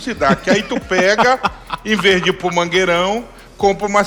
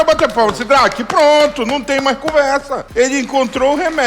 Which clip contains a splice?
second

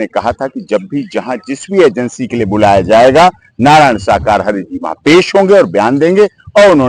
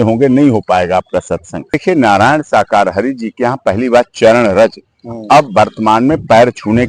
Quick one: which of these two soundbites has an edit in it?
second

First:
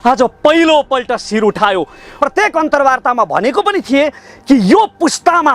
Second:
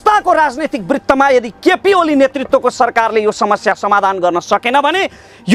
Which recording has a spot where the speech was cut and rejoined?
first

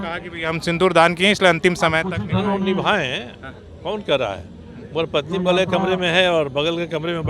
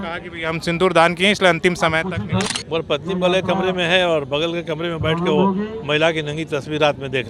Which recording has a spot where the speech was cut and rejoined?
second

